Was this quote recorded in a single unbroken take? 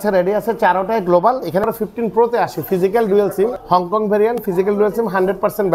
no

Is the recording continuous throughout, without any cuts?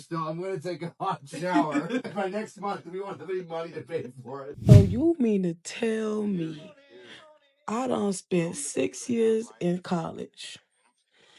no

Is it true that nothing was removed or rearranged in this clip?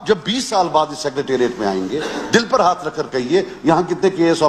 yes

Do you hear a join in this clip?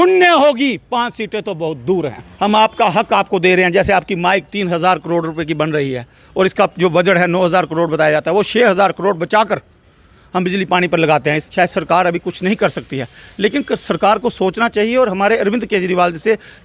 yes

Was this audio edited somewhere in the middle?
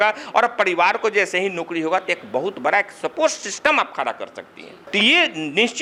no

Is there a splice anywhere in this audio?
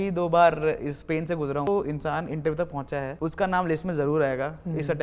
yes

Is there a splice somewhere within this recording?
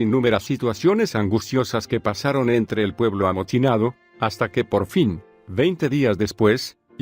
yes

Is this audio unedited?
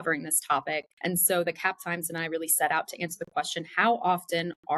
no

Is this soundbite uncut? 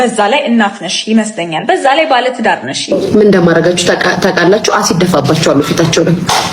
no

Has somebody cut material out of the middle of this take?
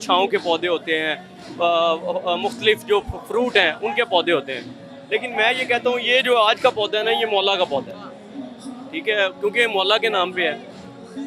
no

